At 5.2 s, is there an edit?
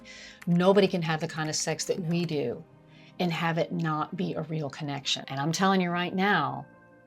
yes; 1 cut; at 5.2 s

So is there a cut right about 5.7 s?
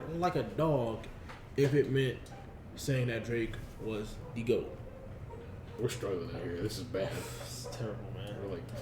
yes; 1 cut; at 5.7 s

